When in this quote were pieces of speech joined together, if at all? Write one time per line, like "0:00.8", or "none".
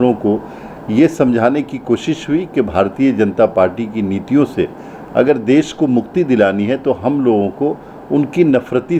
none